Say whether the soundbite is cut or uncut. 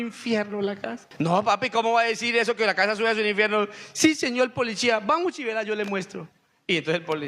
cut